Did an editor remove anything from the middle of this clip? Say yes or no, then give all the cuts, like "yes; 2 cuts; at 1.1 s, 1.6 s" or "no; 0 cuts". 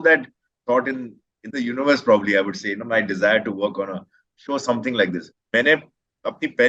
yes; 1 cut; at 5.3 s